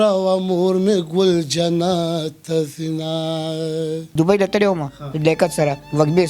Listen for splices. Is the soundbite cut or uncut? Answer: cut